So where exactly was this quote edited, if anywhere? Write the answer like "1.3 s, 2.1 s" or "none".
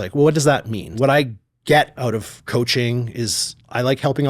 1.0 s